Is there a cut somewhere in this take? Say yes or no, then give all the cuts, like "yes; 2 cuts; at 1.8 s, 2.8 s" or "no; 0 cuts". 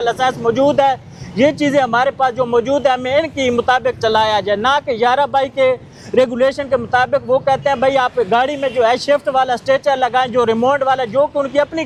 no; 0 cuts